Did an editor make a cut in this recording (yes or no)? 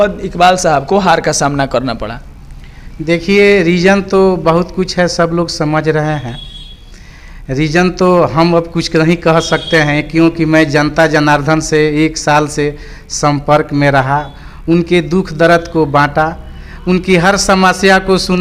no